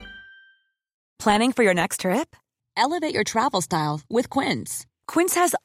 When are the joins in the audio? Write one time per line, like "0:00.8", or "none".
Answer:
none